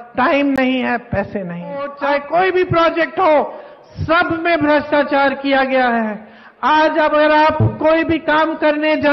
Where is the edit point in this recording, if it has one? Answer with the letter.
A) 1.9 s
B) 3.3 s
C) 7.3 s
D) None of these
A